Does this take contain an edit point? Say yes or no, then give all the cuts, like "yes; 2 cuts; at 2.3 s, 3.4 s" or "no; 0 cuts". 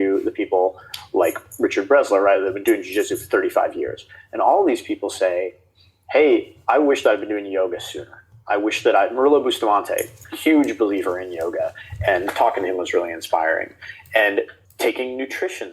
yes; 1 cut; at 14.6 s